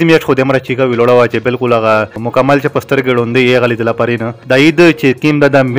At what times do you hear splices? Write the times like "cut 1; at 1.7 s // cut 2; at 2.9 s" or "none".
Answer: cut 1; at 2.2 s // cut 2; at 4.3 s